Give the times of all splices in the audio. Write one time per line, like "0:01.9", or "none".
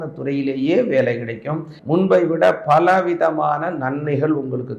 0:01.7